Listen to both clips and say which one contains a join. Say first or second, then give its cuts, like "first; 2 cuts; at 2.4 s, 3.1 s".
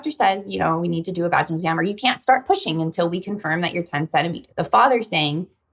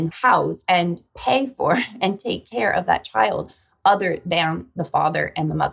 first; 1 cut; at 4.4 s